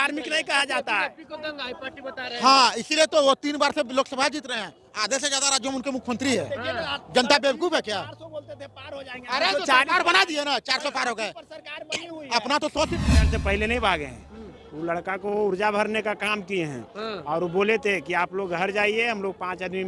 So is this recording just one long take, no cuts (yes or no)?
no